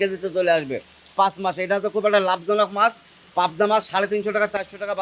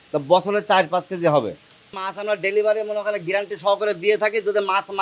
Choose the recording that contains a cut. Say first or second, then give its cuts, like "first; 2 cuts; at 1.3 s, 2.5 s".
second; 1 cut; at 2.1 s